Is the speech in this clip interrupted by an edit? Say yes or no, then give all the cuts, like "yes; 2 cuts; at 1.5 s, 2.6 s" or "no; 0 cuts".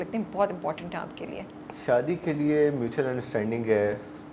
no; 0 cuts